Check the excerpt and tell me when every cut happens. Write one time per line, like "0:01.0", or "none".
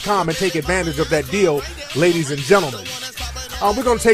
none